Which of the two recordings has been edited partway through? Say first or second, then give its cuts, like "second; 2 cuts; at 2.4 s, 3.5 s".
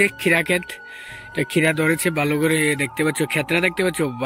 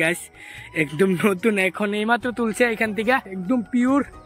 second; 1 cut; at 3.3 s